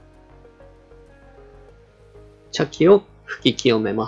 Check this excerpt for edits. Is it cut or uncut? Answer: cut